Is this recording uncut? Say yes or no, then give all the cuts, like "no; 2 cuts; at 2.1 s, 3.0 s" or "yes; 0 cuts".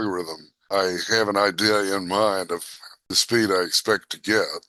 yes; 0 cuts